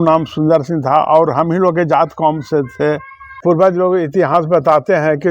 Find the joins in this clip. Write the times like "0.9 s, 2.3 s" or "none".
3.3 s